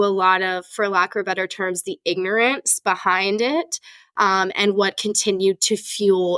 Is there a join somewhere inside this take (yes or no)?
no